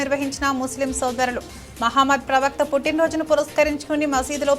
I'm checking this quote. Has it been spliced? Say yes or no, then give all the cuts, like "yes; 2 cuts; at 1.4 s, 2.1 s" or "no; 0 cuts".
no; 0 cuts